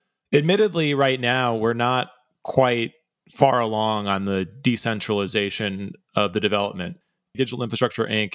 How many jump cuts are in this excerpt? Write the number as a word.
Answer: one